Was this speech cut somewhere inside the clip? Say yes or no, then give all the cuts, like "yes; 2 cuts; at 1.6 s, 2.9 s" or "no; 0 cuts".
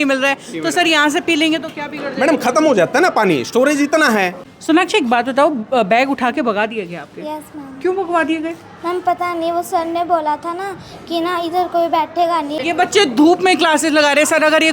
yes; 2 cuts; at 4.4 s, 12.6 s